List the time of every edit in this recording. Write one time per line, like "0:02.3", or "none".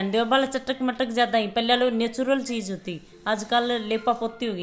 none